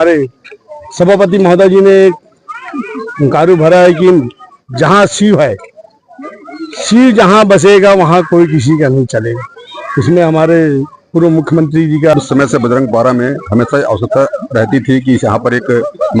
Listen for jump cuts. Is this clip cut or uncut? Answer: cut